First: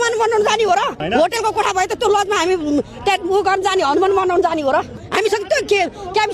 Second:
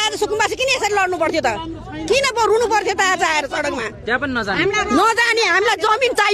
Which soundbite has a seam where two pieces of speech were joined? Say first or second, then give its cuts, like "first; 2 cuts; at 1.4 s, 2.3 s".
first; 2 cuts; at 1.0 s, 5.0 s